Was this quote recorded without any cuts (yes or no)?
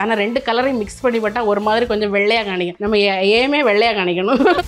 no